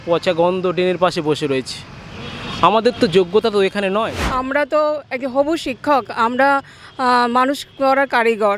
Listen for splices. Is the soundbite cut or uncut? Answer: cut